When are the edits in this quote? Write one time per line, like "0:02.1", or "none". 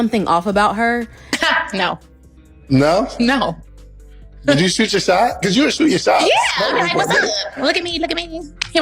0:01.3